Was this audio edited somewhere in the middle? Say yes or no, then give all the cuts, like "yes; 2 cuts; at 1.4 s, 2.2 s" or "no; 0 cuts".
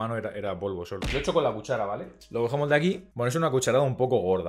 yes; 1 cut; at 3.1 s